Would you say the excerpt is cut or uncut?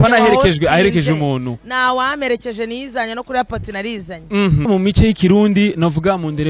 cut